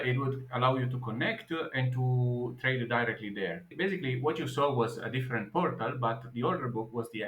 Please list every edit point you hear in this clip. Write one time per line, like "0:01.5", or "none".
0:03.7